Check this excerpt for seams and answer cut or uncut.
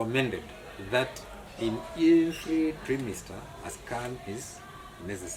uncut